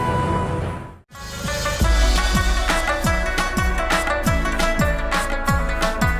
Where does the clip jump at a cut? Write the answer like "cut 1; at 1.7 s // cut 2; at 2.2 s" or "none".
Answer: none